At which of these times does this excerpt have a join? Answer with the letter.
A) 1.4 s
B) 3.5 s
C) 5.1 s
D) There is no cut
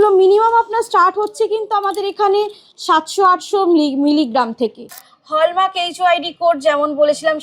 C